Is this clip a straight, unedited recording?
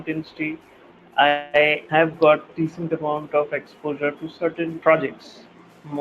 no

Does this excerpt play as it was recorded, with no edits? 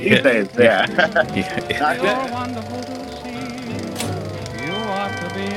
no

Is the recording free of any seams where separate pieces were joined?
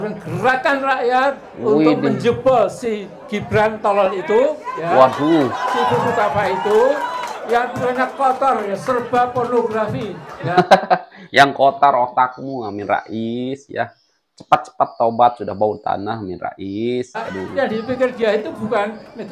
yes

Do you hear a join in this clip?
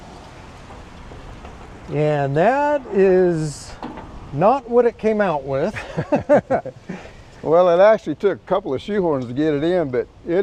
no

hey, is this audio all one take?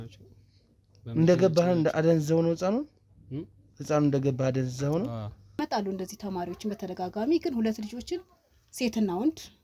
no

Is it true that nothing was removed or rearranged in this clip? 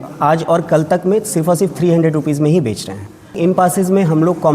no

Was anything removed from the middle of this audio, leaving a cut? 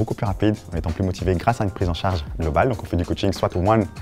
no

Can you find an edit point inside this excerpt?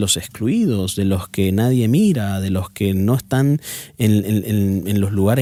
no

